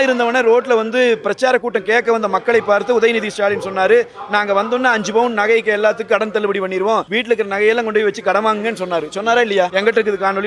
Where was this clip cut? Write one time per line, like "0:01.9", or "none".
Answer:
0:07.1
0:09.7